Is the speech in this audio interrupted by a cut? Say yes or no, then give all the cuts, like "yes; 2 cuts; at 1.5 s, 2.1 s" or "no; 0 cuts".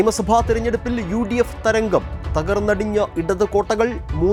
no; 0 cuts